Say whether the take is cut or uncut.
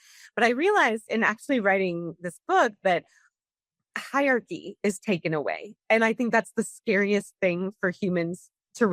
uncut